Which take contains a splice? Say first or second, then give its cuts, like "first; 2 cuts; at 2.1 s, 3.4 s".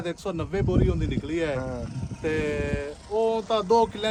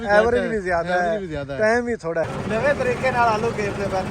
second; 1 cut; at 2.3 s